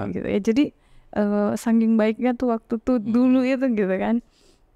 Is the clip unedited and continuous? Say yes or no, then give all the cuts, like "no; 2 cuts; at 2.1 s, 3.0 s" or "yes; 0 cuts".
yes; 0 cuts